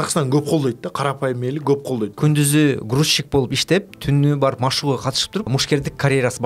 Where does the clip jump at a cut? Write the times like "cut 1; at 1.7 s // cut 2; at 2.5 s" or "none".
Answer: cut 1; at 2.1 s // cut 2; at 5.5 s